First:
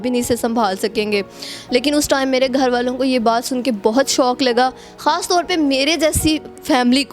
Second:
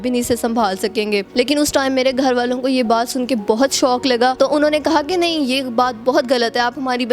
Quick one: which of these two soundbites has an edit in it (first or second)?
second